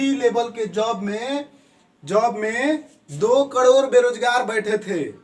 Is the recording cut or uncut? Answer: uncut